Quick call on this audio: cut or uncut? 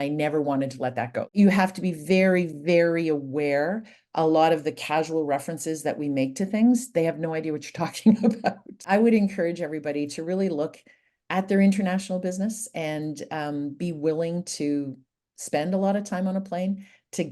cut